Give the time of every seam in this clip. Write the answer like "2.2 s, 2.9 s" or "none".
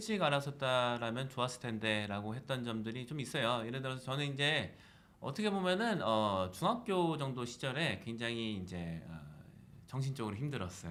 none